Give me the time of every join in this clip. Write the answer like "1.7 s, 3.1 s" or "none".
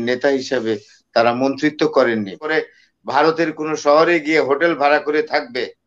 2.4 s